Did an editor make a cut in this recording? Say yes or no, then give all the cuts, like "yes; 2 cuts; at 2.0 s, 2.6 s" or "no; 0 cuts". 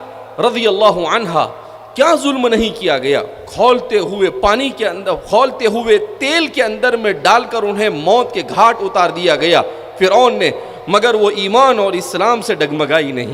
no; 0 cuts